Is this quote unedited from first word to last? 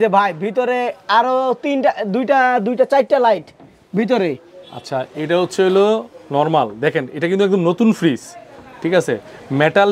yes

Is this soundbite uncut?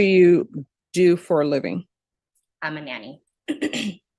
yes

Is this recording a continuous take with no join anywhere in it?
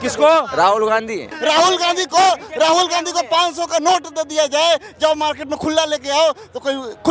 no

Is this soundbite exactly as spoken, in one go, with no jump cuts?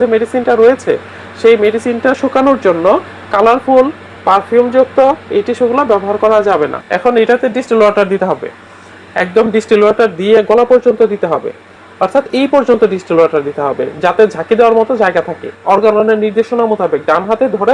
no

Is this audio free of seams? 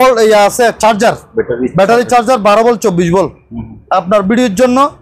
yes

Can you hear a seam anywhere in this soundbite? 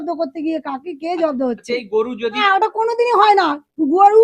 yes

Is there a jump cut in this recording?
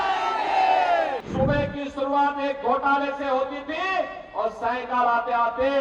yes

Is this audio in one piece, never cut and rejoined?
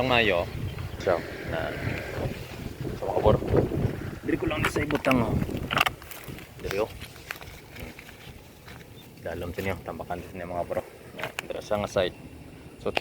no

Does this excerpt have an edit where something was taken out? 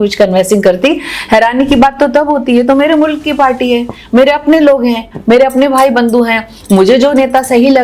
no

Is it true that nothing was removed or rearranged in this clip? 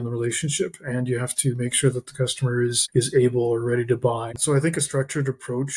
no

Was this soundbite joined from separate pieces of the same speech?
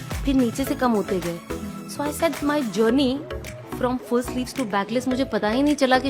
no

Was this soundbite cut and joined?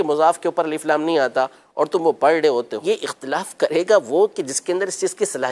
yes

